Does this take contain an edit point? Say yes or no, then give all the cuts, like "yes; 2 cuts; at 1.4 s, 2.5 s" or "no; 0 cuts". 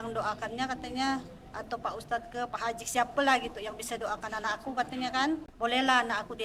yes; 1 cut; at 5.5 s